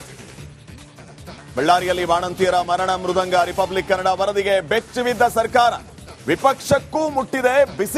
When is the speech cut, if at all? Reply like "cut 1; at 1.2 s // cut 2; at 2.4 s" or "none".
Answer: cut 1; at 1.3 s